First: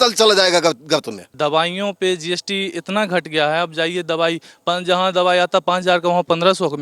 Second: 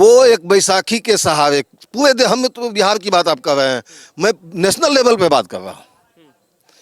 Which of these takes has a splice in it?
first; 1 cut; at 1.2 s

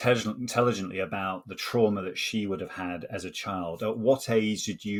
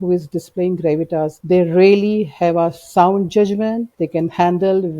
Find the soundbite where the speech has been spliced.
second; 2 cuts; at 1.4 s, 3.9 s

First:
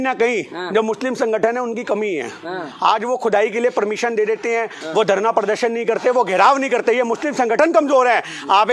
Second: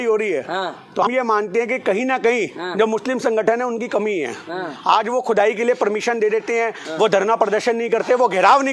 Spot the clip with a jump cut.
second; 1 cut; at 1.0 s

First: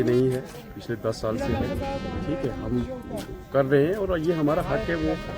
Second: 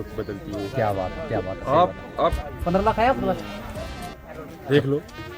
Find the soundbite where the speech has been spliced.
second; 1 cut; at 2.4 s

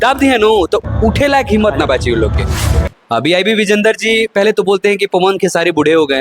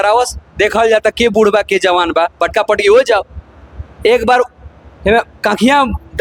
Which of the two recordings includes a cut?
first; 1 cut; at 2.8 s

